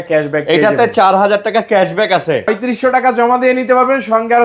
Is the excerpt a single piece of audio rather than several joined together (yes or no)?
no